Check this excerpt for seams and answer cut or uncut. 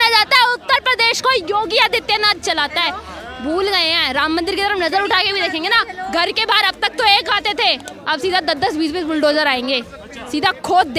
uncut